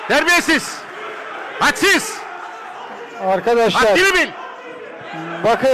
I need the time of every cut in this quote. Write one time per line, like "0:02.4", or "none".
none